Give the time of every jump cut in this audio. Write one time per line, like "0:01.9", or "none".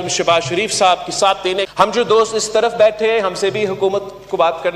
0:01.7